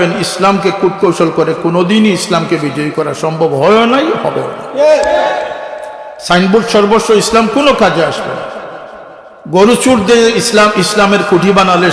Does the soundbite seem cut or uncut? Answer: uncut